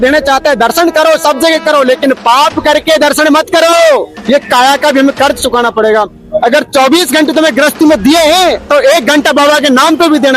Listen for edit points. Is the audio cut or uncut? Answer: cut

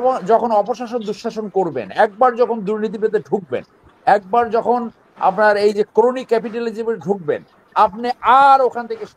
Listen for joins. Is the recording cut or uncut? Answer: uncut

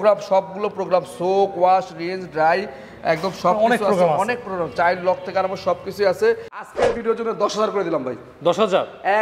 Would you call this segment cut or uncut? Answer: cut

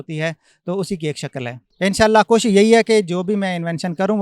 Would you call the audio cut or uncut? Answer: cut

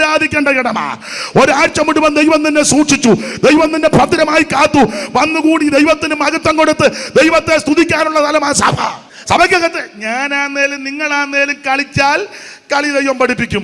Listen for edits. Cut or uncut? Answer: cut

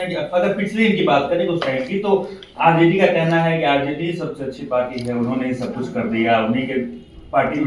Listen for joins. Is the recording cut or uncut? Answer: uncut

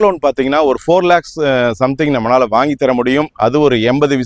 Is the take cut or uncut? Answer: uncut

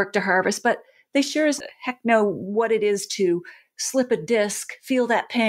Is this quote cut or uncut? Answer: uncut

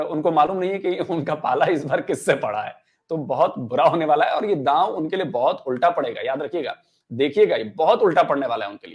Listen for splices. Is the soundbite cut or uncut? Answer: uncut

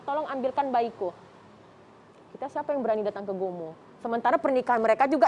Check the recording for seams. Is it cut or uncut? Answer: uncut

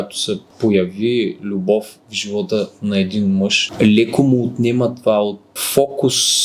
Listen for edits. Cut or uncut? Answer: cut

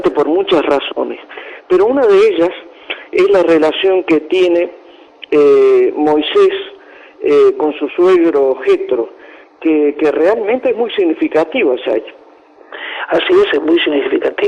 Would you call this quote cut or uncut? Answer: uncut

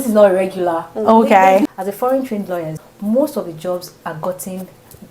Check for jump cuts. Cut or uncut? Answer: cut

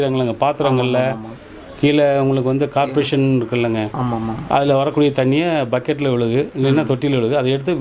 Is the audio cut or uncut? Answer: uncut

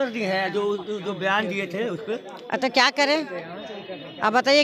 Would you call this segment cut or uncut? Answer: uncut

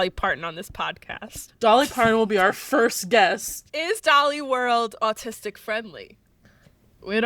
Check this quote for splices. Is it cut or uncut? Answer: cut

